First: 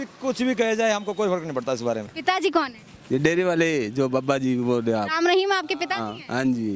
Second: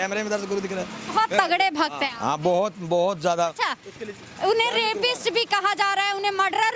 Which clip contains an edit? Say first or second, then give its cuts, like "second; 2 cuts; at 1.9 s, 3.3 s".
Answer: first; 1 cut; at 2.1 s